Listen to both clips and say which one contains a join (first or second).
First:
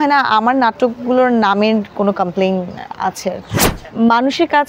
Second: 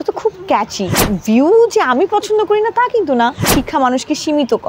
second